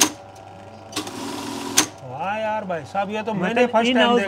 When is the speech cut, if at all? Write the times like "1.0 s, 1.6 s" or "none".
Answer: none